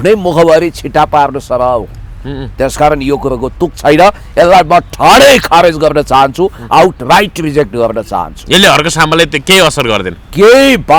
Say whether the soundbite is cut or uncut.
uncut